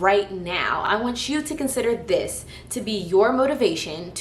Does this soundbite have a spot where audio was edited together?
no; 0 cuts

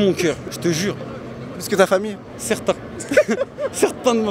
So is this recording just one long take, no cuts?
yes; 0 cuts

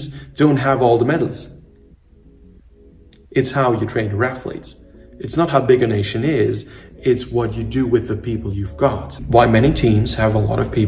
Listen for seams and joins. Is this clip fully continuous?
no; 1 cut; at 9.2 s

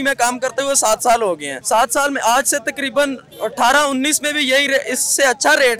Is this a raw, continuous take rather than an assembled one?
no; 1 cut; at 1.5 s

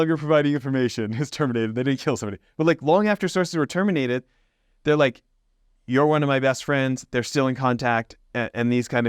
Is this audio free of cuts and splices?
yes; 0 cuts

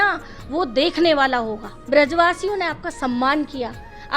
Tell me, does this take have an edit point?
yes; 1 cut; at 1.7 s

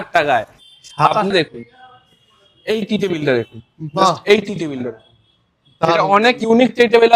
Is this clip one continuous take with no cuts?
no; 1 cut; at 1.3 s

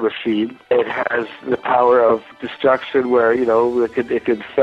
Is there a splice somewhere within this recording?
yes; 2 cuts; at 0.7 s, 2.2 s

